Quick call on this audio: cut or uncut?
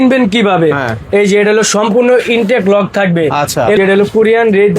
cut